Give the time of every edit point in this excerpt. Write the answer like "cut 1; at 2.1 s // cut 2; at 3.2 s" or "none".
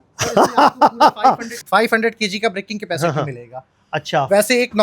cut 1; at 1.5 s